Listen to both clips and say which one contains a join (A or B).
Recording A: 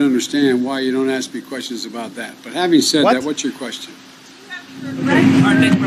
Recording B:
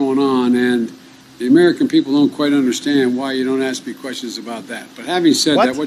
A